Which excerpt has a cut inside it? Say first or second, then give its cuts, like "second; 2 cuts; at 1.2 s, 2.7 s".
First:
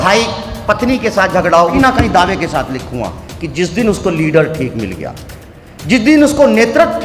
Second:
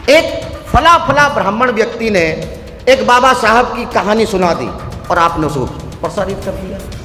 first; 1 cut; at 1.8 s